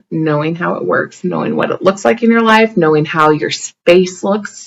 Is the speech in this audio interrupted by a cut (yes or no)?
no